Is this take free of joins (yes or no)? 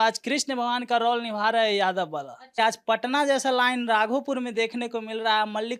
no